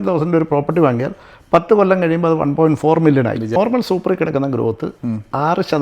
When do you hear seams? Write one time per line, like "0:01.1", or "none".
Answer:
0:03.6

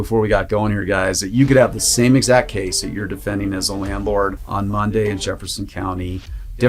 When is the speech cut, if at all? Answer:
0:04.4

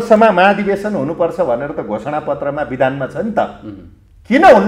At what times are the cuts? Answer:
none

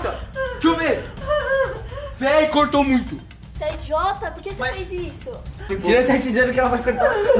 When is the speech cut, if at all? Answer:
0:05.7

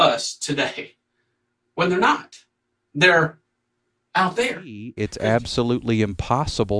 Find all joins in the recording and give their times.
0:05.0

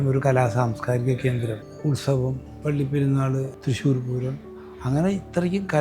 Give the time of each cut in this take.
0:01.7
0:02.5
0:03.5

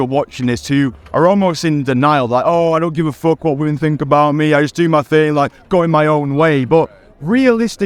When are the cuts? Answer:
none

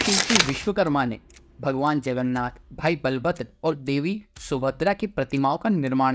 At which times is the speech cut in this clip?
none

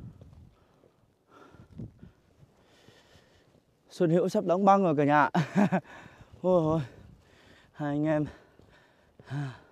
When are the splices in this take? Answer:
none

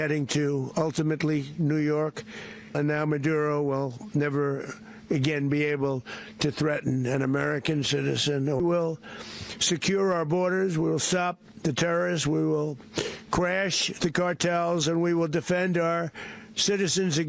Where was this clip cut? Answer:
0:02.7
0:08.6

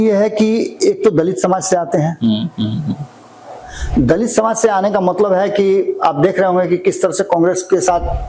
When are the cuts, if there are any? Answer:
none

